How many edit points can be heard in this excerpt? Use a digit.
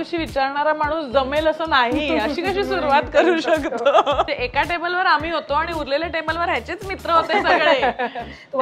1